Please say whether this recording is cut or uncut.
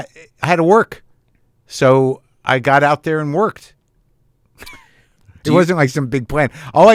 uncut